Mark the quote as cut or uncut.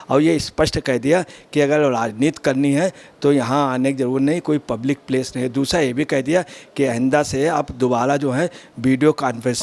uncut